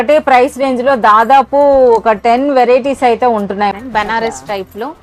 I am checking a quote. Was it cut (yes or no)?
yes